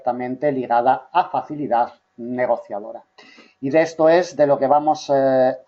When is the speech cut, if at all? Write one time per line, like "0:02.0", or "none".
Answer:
none